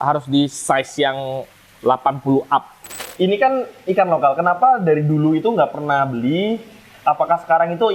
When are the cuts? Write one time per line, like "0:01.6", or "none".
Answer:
0:03.0